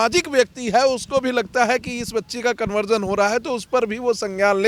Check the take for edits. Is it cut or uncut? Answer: uncut